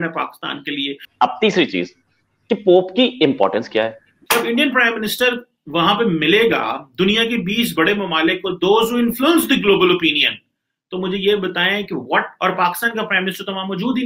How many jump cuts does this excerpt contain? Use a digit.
2